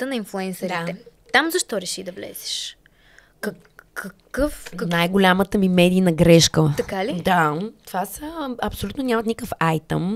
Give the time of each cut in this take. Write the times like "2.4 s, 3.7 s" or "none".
none